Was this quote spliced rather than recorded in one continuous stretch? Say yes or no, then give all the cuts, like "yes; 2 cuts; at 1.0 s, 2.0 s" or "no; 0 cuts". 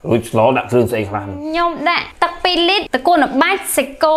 yes; 2 cuts; at 1.3 s, 2.6 s